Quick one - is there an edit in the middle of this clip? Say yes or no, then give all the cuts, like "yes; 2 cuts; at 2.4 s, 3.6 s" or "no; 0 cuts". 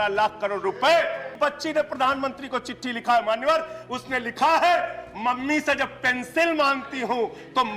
yes; 1 cut; at 1.3 s